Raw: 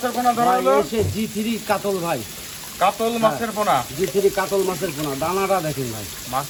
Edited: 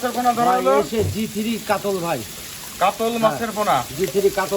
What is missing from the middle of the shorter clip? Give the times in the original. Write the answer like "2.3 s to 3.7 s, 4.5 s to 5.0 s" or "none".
none